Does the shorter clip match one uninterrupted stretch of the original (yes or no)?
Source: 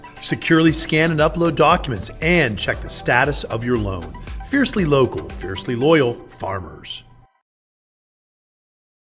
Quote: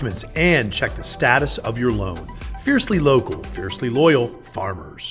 yes